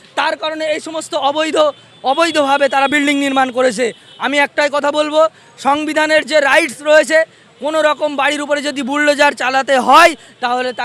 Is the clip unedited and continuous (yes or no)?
yes